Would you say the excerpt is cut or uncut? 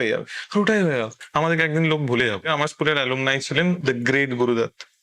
cut